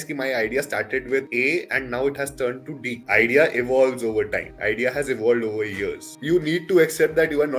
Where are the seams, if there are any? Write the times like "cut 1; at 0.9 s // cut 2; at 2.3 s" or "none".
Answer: cut 1; at 6.1 s